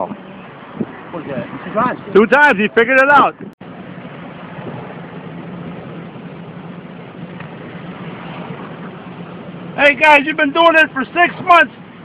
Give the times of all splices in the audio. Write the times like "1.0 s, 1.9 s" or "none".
3.5 s